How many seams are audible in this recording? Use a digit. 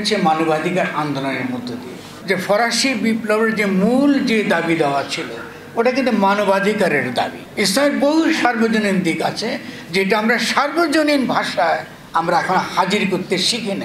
2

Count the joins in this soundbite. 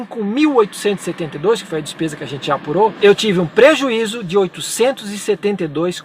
1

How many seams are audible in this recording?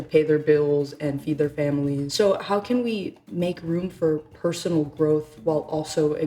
1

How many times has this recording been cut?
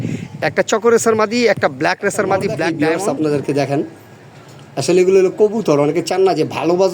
1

